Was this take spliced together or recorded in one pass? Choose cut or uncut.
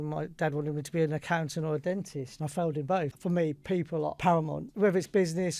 cut